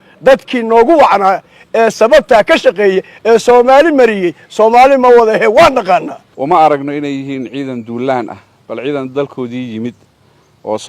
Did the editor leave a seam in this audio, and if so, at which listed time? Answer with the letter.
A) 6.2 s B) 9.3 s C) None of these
A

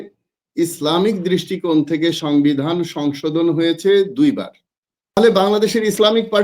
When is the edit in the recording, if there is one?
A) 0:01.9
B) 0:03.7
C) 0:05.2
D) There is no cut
C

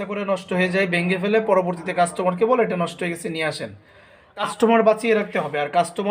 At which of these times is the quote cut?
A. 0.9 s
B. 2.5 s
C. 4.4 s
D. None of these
C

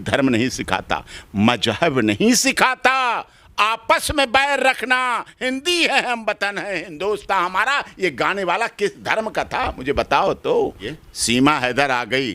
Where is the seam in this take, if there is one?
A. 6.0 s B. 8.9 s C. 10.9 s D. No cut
C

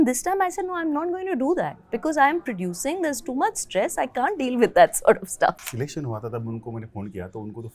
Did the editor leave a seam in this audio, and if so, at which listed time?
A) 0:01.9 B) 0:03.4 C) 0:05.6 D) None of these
C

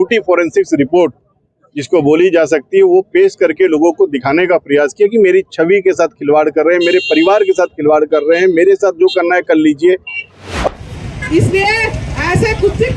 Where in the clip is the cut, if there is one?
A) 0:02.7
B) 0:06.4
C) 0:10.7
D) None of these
C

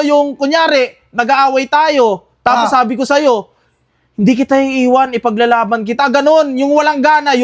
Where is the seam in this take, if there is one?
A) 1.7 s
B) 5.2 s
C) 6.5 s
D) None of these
D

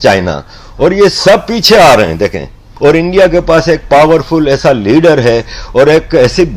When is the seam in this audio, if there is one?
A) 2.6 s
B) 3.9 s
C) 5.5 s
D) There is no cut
A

